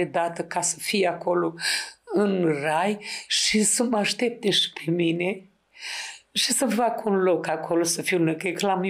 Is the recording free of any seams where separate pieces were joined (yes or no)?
yes